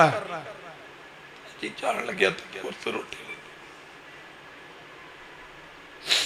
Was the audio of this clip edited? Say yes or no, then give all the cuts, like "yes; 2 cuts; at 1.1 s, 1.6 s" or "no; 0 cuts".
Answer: no; 0 cuts